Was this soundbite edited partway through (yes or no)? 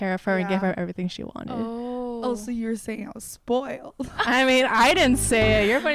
no